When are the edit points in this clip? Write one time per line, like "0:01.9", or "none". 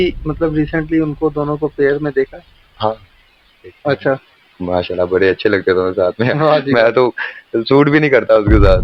none